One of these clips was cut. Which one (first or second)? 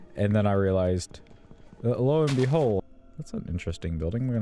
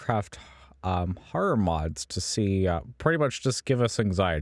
first